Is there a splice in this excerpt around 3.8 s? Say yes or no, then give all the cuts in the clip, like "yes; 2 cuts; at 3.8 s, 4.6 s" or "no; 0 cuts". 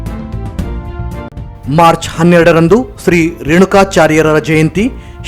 no; 1 cut; at 1.3 s